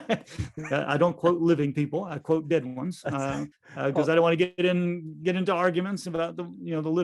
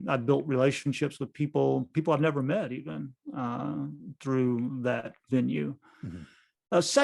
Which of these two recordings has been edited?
first; 1 cut; at 3.6 s

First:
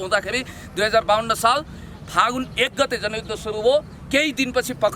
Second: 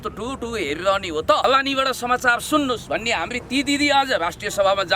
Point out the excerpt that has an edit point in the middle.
second; 1 cut; at 1.4 s

